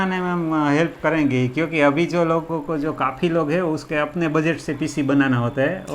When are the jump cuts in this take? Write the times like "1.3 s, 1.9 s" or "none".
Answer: 2.5 s, 3.8 s